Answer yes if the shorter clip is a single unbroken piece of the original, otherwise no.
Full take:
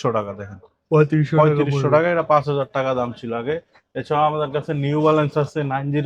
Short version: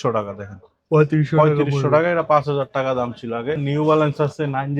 no